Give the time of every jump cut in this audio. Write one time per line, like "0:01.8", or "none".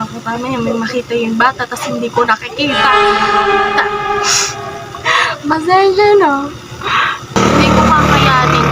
0:07.4